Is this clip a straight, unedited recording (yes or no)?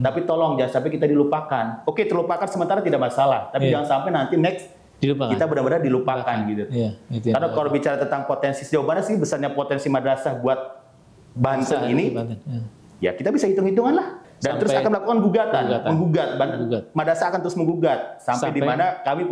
no